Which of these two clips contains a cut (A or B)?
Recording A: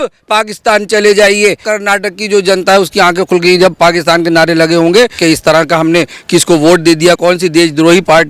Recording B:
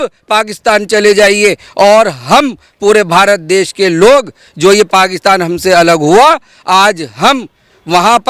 A